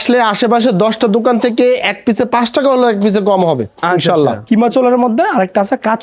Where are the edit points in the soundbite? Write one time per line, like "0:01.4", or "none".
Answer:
0:04.4